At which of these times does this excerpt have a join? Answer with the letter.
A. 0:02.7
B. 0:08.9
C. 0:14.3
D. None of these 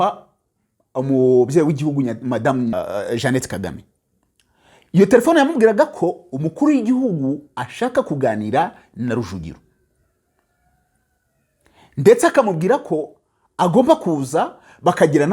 A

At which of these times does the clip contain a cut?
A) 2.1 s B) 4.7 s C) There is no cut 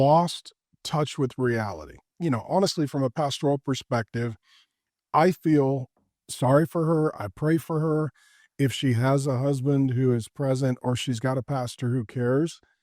A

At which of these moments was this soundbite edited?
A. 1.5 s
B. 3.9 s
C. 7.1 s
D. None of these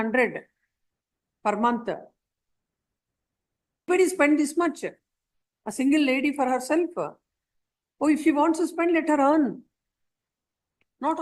B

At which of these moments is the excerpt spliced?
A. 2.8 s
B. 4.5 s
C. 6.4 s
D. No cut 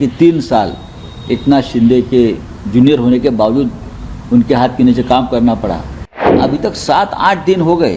C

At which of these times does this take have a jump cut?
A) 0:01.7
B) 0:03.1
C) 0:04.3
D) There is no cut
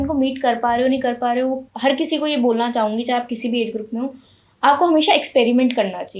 A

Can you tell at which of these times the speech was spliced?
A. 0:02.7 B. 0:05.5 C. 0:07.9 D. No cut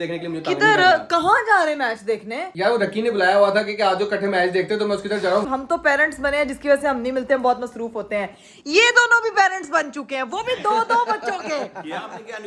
B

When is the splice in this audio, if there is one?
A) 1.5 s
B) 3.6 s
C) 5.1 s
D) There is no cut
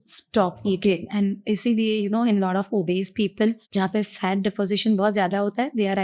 B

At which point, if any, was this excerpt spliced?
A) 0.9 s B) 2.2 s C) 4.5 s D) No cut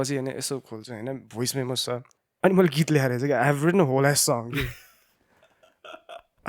B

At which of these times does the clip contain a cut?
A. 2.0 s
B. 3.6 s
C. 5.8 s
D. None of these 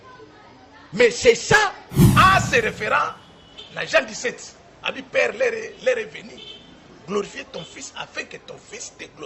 A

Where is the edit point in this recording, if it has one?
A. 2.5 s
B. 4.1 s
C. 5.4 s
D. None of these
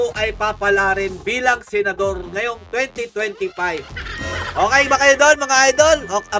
B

